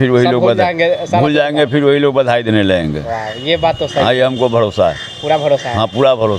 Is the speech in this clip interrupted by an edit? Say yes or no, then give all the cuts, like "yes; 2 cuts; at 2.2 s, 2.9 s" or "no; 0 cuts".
no; 0 cuts